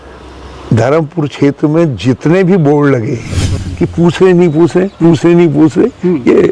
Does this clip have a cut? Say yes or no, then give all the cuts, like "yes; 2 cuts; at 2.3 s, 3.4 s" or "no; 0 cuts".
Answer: yes; 1 cut; at 3.6 s